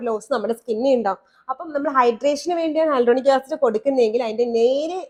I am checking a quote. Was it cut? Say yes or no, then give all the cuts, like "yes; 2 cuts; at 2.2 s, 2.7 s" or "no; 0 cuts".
no; 0 cuts